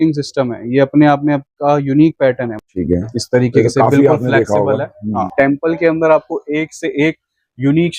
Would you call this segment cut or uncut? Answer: cut